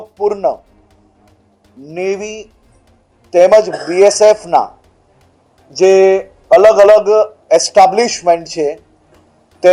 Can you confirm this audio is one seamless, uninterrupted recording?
yes; 0 cuts

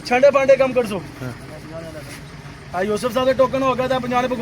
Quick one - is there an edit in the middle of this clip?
yes; 1 cut; at 2.5 s

